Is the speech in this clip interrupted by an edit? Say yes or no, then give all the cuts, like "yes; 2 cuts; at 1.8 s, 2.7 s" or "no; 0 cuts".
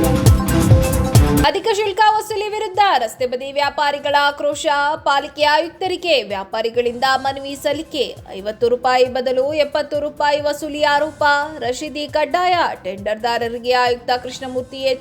yes; 1 cut; at 1.4 s